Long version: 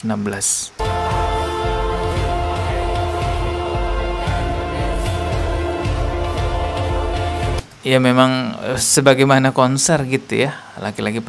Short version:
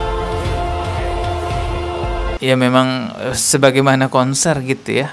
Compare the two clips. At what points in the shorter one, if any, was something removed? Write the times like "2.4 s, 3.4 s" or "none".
2.4 s